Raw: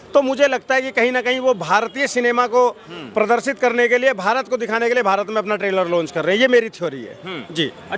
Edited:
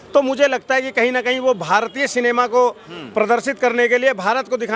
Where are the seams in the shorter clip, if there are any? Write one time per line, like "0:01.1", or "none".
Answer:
none